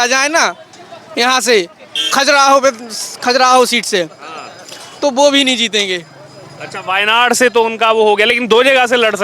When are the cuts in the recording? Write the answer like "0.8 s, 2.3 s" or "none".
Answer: none

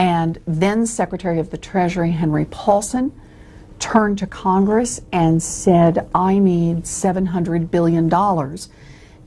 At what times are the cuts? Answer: none

